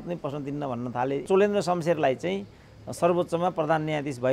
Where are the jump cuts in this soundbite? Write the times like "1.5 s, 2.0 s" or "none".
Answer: 1.2 s